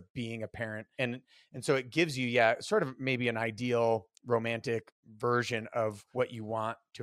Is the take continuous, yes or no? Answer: no